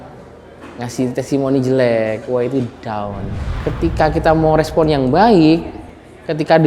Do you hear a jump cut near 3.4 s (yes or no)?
yes